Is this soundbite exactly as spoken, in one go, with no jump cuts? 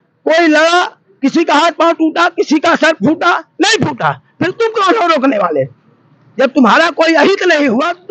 yes; 0 cuts

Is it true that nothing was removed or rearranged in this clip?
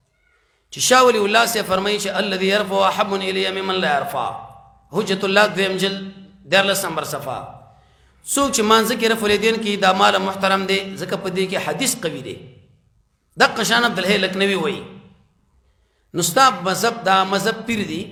yes; 0 cuts

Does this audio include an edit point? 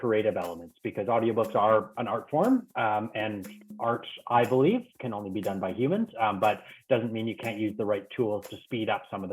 no; 0 cuts

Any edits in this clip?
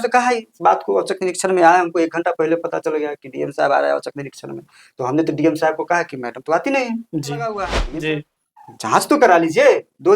yes; 1 cut; at 7.8 s

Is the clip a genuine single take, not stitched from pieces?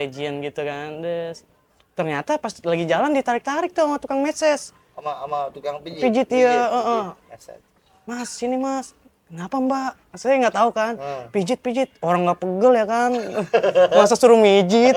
yes; 0 cuts

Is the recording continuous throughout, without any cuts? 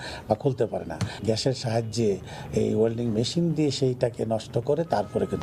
yes; 0 cuts

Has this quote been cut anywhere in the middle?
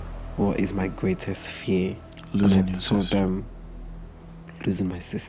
yes; 1 cut; at 2.1 s

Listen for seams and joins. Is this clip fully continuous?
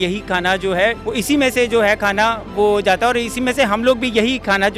no; 1 cut; at 1.0 s

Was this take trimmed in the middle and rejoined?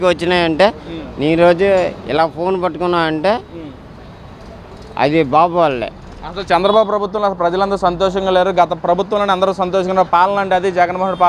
no; 0 cuts

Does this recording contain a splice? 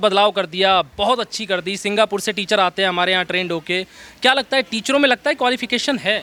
no; 0 cuts

